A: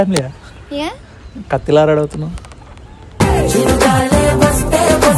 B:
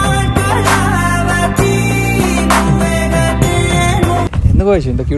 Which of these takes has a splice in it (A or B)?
B